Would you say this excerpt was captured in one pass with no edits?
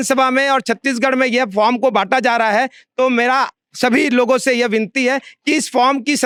yes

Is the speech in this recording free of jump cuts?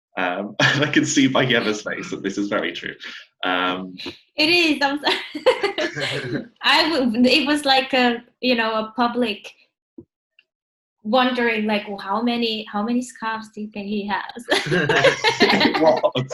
yes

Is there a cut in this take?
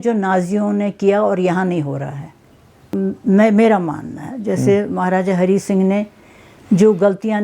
yes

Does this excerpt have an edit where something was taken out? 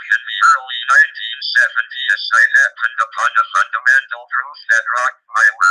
yes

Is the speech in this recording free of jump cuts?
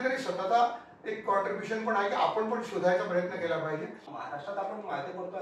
no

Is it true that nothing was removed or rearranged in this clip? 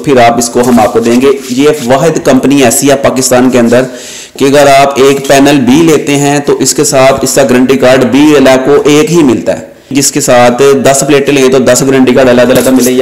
yes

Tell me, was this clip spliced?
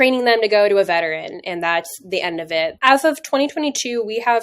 yes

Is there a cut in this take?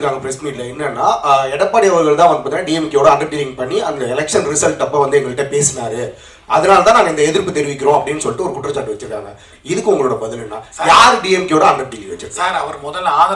no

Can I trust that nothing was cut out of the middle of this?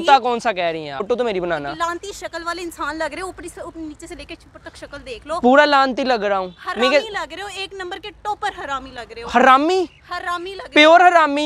no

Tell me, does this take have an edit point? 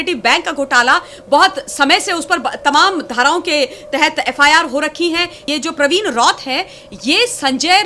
yes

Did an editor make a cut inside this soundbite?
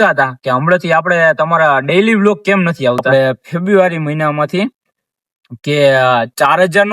yes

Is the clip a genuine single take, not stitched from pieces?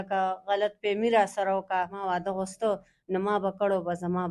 no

